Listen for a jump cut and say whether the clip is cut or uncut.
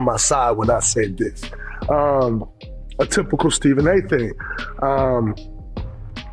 cut